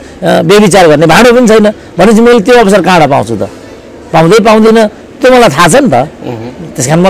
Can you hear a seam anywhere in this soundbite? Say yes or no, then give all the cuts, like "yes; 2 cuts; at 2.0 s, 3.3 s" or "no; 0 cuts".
no; 0 cuts